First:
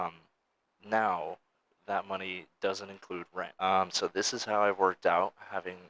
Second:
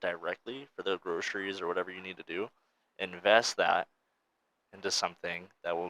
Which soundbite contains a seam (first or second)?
first